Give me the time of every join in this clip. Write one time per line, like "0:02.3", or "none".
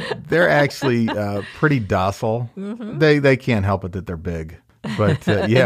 none